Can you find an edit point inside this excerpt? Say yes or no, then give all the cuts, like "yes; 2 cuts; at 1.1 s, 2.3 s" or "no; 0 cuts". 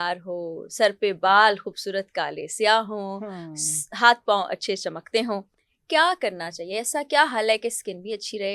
no; 0 cuts